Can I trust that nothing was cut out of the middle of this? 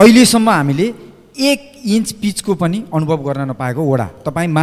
yes; 0 cuts

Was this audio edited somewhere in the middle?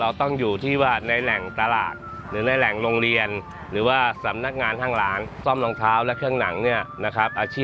no; 0 cuts

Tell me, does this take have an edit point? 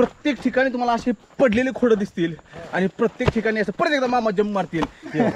no; 0 cuts

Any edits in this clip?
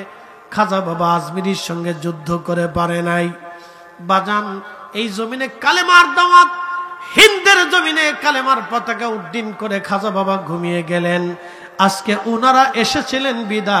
no; 0 cuts

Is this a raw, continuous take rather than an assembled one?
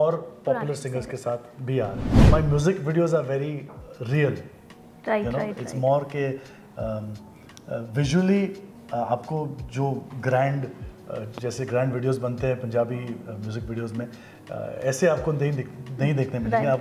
no; 1 cut; at 2.1 s

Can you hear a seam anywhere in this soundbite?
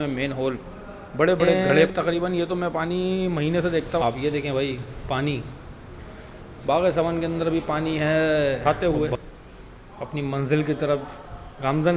yes; 3 cuts; at 1.9 s, 4.0 s, 8.6 s

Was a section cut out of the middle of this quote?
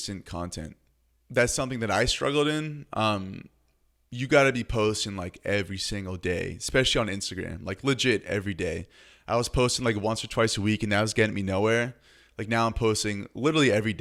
no; 0 cuts

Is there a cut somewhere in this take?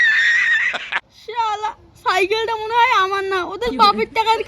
yes; 1 cut; at 1.2 s

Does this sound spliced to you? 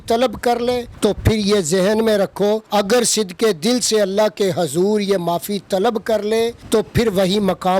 yes; 3 cuts; at 0.9 s, 2.6 s, 6.6 s

